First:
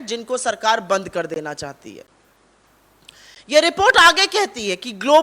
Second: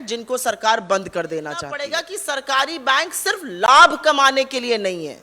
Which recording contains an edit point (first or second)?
second